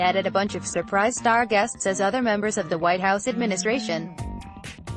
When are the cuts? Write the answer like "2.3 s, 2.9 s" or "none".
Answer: none